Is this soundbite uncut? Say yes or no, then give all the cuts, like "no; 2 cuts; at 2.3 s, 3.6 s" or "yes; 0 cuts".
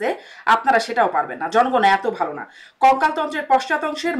yes; 0 cuts